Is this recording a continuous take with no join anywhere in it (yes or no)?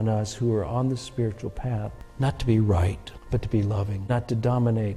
no